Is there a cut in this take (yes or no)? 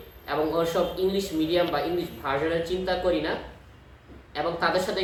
no